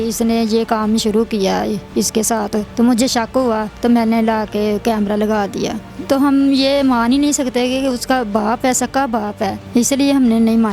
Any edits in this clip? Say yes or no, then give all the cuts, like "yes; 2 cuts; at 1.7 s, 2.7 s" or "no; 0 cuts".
yes; 4 cuts; at 2.7 s, 3.7 s, 5.9 s, 9.6 s